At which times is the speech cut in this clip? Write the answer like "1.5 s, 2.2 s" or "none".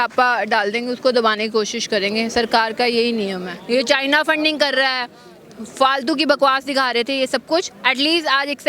3.5 s